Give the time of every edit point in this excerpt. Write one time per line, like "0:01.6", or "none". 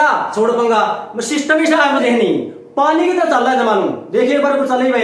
0:02.0